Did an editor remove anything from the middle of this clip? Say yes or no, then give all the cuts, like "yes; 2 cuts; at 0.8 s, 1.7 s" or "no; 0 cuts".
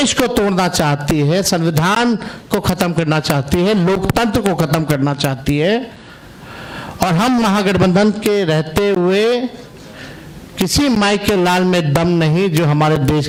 no; 0 cuts